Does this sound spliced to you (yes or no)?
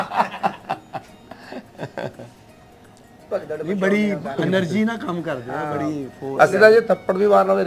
yes